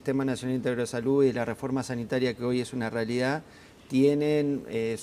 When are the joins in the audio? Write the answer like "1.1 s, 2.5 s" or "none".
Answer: 1.4 s